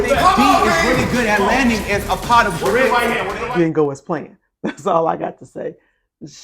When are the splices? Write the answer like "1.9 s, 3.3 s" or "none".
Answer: 3.4 s, 4.8 s